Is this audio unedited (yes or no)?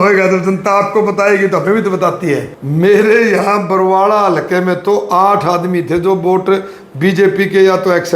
no